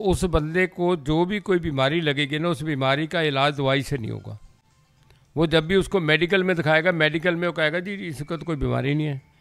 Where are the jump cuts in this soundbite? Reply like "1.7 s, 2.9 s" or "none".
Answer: none